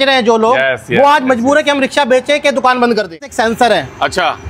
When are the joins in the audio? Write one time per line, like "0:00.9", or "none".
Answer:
0:03.3